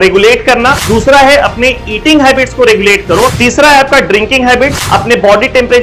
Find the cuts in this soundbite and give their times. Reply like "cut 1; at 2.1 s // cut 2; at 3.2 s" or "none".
cut 1; at 0.8 s // cut 2; at 3.4 s // cut 3; at 4.8 s